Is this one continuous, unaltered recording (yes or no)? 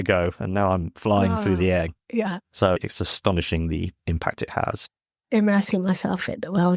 no